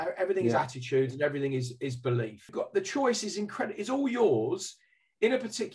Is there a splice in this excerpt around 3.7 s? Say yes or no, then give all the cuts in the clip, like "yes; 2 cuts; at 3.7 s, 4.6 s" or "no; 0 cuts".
no; 1 cut; at 2.5 s